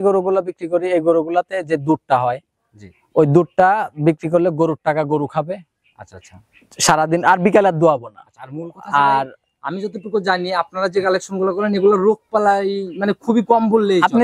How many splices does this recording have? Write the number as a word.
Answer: zero